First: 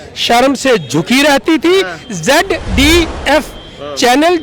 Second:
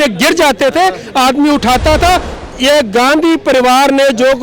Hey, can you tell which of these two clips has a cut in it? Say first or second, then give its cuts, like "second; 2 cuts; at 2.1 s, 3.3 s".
second; 1 cut; at 2.3 s